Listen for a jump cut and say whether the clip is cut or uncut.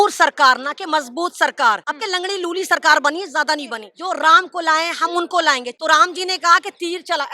cut